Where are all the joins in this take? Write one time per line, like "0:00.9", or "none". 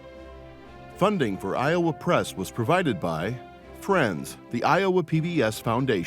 0:01.0